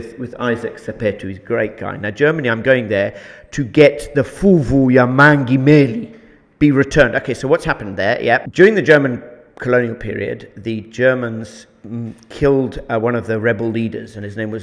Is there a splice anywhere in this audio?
yes; 1 cut; at 8.4 s

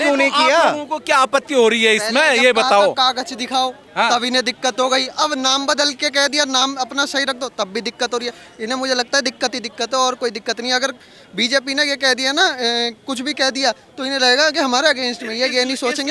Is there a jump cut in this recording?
no; 0 cuts

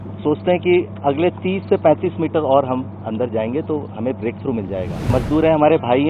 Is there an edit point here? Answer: yes; 1 cut; at 5.1 s

